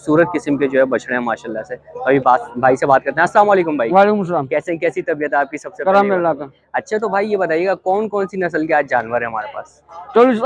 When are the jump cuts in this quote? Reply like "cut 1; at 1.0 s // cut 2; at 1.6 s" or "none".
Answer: none